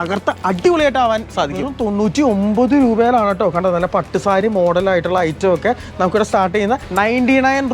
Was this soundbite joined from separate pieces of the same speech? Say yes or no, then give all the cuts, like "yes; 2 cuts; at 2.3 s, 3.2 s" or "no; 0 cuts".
yes; 2 cuts; at 1.7 s, 6.8 s